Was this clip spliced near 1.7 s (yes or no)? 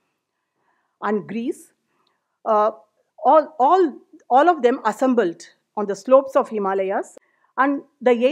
no